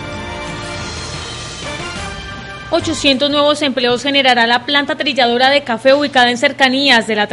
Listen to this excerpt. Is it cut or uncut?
uncut